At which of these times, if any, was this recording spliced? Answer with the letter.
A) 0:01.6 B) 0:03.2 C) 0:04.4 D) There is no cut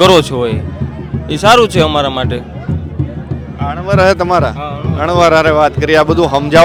D